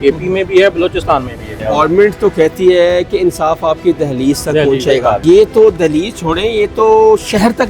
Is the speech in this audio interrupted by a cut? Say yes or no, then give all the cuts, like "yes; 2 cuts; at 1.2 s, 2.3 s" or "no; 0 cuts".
yes; 2 cuts; at 1.5 s, 5.2 s